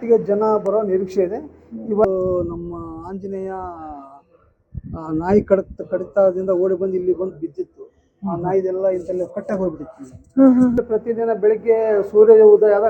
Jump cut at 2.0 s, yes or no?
yes